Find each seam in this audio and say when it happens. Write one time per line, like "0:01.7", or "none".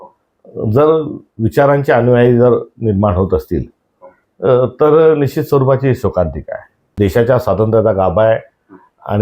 0:06.8

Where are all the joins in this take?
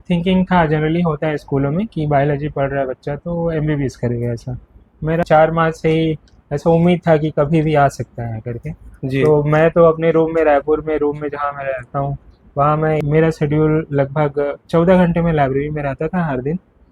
0:05.2
0:13.0

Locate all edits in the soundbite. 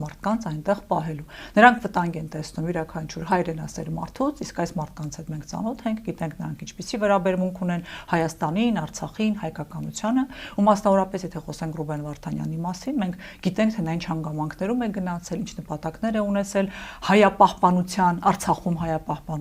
none

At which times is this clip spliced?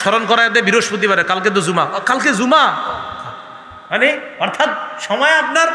none

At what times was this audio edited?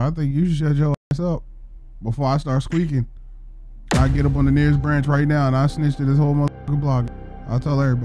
0:07.1

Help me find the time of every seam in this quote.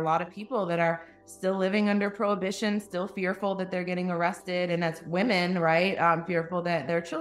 none

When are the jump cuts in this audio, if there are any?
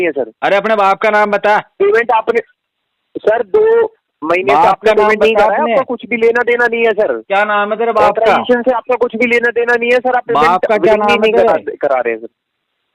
none

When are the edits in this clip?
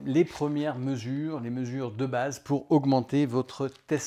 none

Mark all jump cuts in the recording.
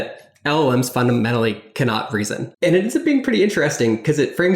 0:02.4

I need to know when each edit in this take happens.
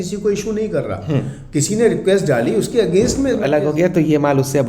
0:03.4

